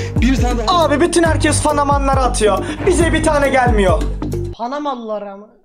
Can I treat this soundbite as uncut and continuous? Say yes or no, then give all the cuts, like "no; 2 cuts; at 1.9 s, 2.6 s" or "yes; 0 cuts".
yes; 0 cuts